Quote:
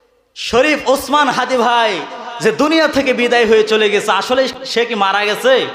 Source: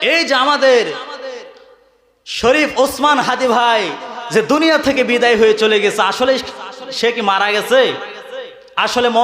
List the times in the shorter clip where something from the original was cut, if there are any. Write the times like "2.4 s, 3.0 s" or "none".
4.6 s